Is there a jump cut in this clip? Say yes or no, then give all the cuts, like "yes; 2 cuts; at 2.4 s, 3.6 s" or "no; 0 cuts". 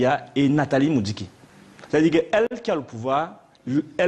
no; 0 cuts